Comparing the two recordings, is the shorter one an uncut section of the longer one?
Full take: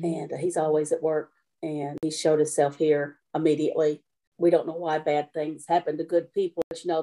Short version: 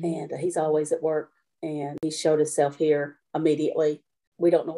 yes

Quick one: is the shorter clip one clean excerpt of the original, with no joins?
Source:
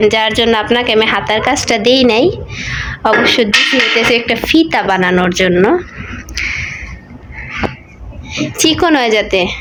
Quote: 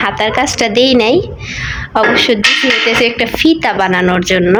yes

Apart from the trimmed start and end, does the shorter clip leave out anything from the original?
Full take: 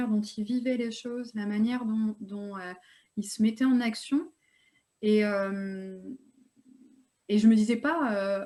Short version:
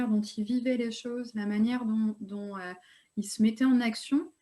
no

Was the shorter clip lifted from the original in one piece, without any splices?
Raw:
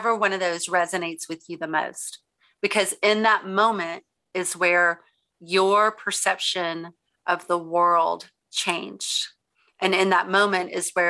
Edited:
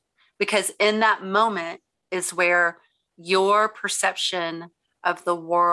yes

